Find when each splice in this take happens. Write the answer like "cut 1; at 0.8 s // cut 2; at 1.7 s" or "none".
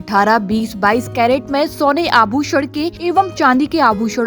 cut 1; at 2.9 s